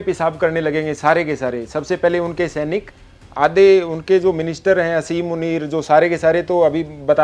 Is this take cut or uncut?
uncut